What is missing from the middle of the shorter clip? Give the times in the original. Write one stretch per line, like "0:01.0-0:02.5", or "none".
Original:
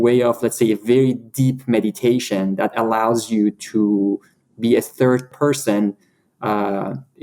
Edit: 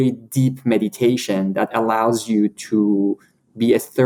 none